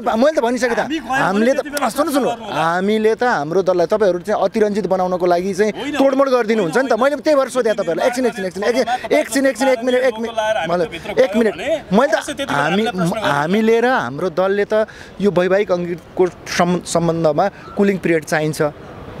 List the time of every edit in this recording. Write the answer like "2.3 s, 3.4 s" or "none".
none

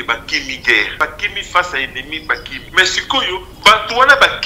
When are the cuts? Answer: 0.9 s, 2.6 s, 3.5 s

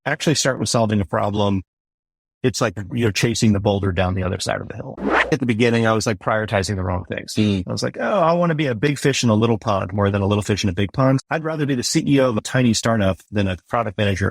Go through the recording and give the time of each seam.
5.3 s, 11.2 s, 12.4 s, 13.2 s

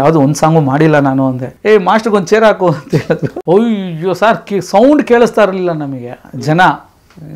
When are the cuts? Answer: 1.5 s, 3.3 s

